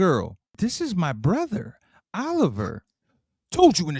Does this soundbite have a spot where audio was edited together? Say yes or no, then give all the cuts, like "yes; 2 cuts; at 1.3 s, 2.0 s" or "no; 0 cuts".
no; 0 cuts